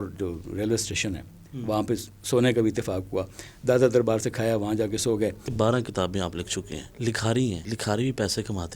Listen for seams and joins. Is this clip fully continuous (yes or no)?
no